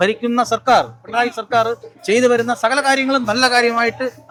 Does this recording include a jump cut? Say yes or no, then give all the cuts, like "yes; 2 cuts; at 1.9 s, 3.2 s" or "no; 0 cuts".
no; 0 cuts